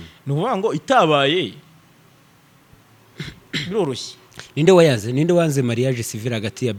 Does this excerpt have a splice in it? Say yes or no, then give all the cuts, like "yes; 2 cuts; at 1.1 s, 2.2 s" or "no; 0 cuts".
no; 0 cuts